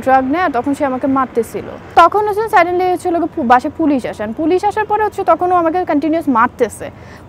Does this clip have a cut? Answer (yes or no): yes